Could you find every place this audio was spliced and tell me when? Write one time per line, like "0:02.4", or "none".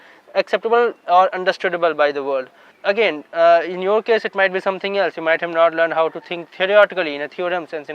0:02.7